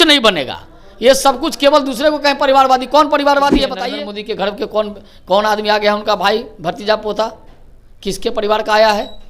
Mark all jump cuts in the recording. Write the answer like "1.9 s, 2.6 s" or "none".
3.8 s